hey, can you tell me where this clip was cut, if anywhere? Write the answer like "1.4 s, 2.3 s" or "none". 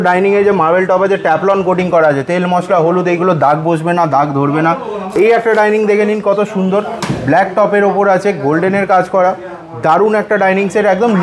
5.0 s